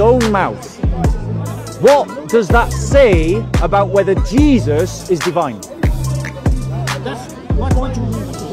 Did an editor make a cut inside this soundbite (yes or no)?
no